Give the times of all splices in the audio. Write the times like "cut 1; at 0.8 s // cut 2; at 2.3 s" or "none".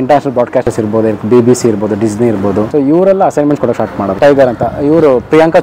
cut 1; at 2.7 s // cut 2; at 4.1 s